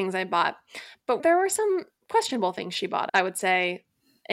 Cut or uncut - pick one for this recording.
cut